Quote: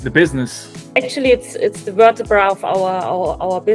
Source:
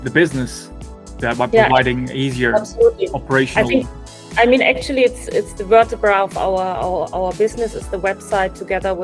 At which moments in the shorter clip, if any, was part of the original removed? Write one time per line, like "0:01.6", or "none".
0:00.9